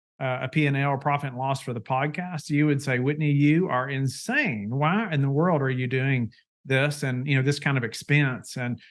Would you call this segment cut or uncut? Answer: uncut